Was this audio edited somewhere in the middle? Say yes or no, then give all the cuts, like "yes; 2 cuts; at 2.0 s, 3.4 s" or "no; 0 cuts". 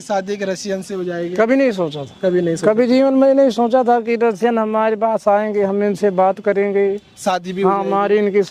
no; 0 cuts